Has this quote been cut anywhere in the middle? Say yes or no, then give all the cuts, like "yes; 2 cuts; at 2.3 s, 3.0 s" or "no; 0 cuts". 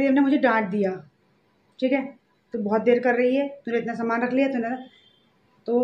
no; 0 cuts